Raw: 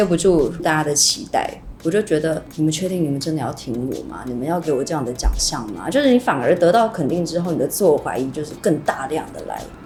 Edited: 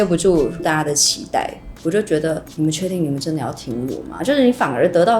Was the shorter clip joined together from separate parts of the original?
yes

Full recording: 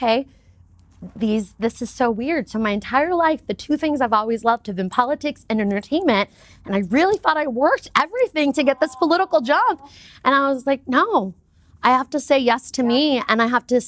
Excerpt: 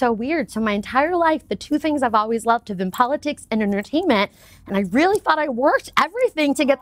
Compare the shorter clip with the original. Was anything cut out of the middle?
no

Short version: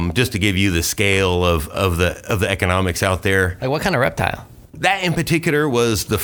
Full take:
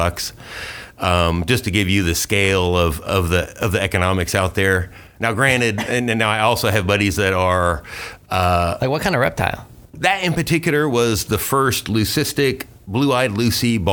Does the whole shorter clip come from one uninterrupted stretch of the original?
no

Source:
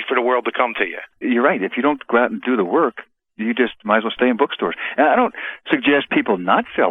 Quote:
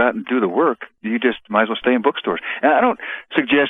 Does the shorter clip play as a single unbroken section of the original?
no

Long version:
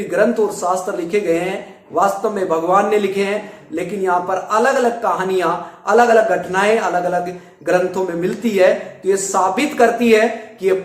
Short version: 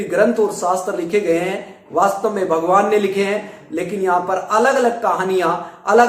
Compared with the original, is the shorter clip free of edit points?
yes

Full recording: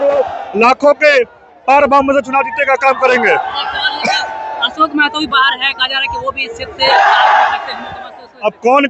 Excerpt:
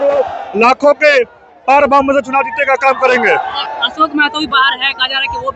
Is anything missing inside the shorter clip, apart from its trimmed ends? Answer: yes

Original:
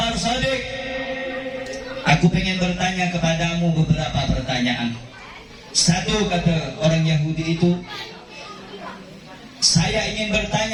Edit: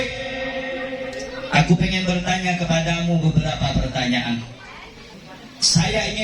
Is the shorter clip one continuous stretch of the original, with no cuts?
no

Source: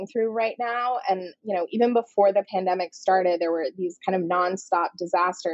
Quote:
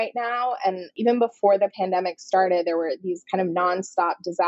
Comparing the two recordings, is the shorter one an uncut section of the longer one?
no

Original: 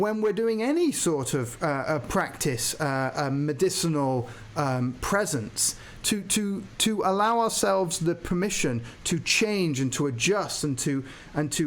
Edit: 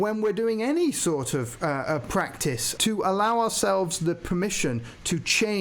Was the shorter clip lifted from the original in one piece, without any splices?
no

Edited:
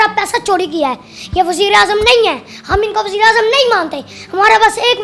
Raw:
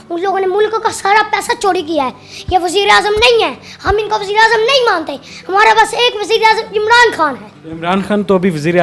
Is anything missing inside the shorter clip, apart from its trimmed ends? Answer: no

